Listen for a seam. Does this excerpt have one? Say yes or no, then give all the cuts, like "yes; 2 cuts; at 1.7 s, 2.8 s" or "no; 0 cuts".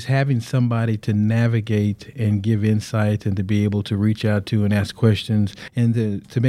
no; 0 cuts